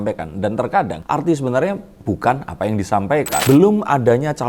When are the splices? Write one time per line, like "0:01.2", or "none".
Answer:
0:01.0
0:03.4